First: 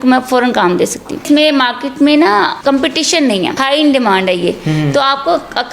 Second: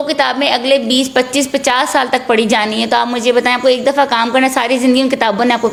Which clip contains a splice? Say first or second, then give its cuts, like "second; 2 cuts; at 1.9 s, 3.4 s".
first; 3 cuts; at 1.2 s, 2.5 s, 3.6 s